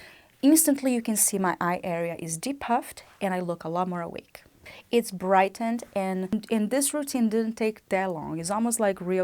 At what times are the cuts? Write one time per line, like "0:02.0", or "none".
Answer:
0:06.3